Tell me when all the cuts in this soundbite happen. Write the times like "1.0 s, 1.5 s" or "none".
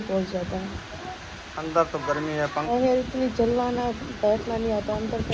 2.7 s